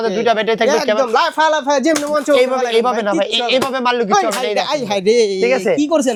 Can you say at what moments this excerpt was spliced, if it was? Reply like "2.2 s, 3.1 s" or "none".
none

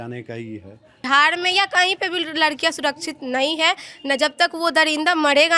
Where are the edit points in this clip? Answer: 1.1 s

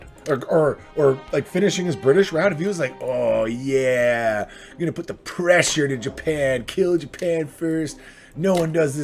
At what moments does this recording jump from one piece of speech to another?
none

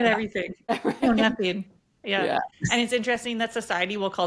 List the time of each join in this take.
0.7 s, 2.6 s

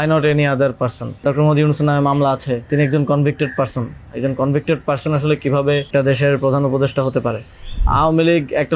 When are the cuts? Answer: 1.2 s, 2.7 s, 5.9 s, 7.8 s

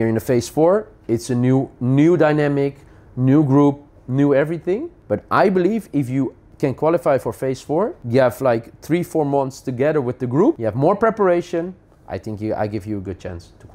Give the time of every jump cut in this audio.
4.9 s, 6.4 s, 8.0 s, 10.6 s

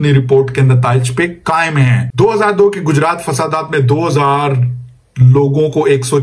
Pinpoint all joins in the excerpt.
2.0 s

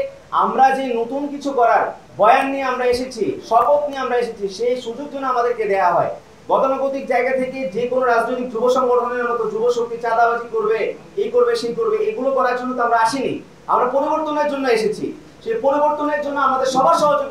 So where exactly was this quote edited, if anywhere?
2.0 s

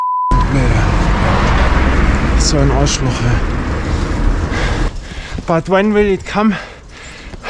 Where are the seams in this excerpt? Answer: 4.9 s

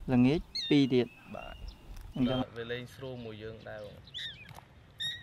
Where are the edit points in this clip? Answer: 2.4 s

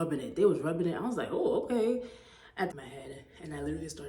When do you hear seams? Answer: 2.7 s

